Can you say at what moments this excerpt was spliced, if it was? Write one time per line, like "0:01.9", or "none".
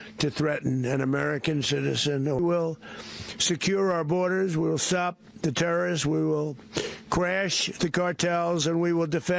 0:02.4